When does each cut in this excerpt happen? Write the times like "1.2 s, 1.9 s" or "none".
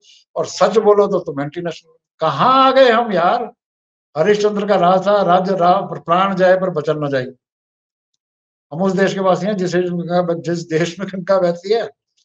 none